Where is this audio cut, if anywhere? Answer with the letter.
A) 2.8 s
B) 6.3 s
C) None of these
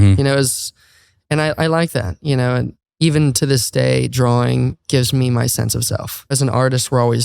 B